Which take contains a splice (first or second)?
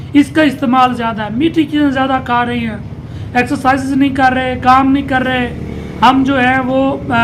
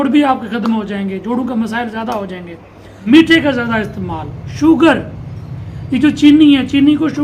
second